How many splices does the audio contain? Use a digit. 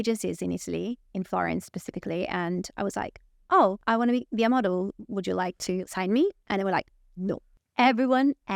3